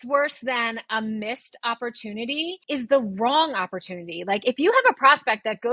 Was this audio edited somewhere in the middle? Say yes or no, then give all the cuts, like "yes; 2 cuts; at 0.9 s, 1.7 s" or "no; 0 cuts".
yes; 1 cut; at 2.6 s